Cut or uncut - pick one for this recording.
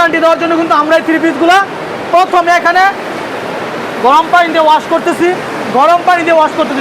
cut